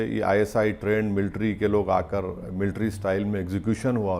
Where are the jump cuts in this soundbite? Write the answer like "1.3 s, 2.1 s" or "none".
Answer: none